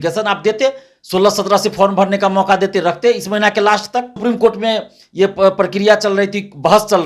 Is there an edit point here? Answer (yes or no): yes